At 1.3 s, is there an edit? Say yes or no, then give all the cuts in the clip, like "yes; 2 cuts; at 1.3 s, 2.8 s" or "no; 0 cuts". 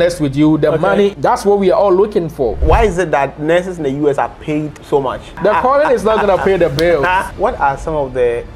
no; 3 cuts; at 2.6 s, 5.2 s, 7.3 s